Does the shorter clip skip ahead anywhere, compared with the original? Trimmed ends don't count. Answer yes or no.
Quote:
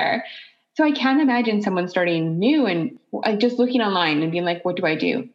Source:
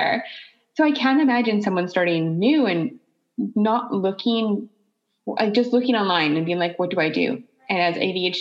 yes